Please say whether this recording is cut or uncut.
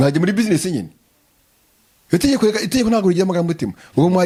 uncut